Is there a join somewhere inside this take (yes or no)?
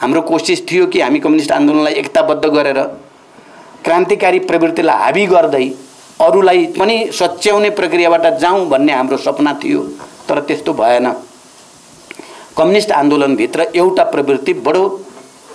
no